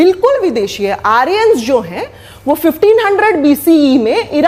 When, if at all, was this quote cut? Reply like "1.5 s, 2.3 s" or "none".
none